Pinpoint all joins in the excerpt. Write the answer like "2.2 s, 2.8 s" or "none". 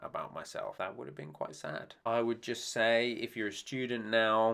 2.0 s